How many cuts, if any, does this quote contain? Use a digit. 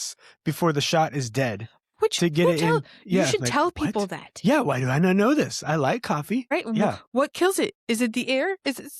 1